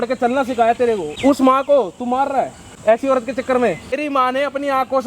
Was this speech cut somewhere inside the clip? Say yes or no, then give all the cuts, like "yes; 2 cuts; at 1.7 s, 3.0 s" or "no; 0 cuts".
yes; 3 cuts; at 1.1 s, 2.7 s, 4.0 s